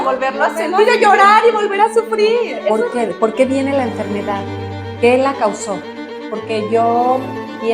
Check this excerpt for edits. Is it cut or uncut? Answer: cut